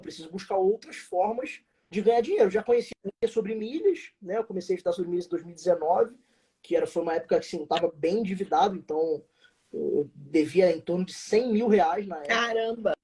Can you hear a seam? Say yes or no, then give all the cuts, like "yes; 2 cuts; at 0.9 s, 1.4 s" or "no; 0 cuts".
no; 0 cuts